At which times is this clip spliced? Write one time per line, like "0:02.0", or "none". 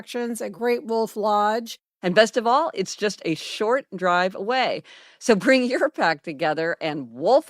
0:01.8